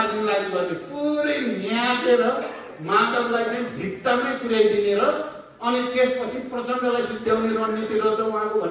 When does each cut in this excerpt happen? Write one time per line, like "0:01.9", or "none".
none